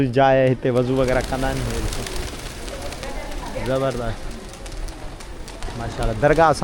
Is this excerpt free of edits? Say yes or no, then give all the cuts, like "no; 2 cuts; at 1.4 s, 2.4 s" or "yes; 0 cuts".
yes; 0 cuts